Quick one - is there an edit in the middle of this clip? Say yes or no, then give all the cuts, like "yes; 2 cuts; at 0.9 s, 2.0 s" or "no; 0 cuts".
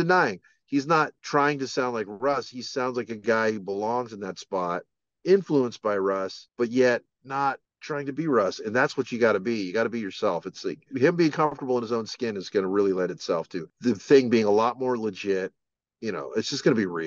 yes; 5 cuts; at 1.2 s, 6.4 s, 7.7 s, 10.9 s, 13.6 s